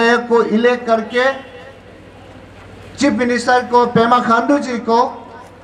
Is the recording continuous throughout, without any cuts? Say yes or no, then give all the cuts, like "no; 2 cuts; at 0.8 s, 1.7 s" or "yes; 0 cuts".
yes; 0 cuts